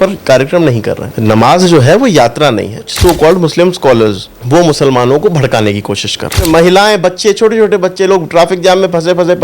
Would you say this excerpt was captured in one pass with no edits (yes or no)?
no